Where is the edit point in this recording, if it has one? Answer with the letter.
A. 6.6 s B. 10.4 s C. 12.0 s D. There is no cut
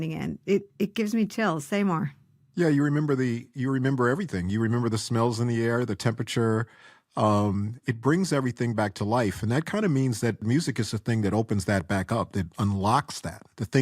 B